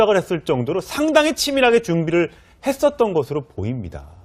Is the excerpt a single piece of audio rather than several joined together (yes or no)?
no